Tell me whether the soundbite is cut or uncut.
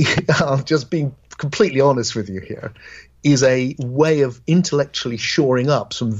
cut